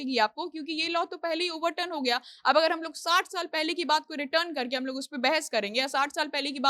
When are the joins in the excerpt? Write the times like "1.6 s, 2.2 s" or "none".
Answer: none